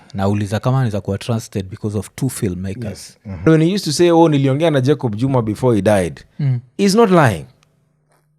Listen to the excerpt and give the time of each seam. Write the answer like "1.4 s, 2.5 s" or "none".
3.4 s

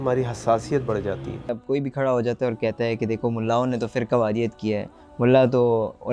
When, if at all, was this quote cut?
1.6 s

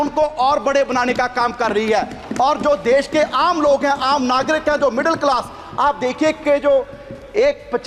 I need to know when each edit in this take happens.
none

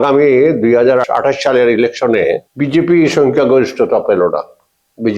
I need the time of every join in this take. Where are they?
1.1 s, 2.5 s

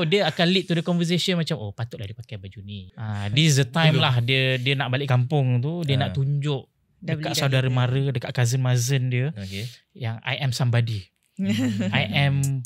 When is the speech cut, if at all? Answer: 3.2 s

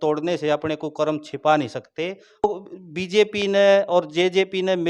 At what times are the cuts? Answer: 2.4 s

